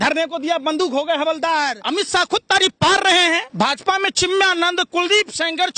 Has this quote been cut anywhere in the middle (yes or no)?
yes